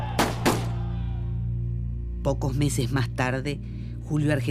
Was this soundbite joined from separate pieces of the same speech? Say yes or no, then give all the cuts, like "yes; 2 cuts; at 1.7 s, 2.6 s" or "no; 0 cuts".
yes; 1 cut; at 3.6 s